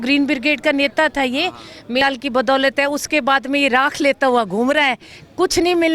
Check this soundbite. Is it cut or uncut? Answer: cut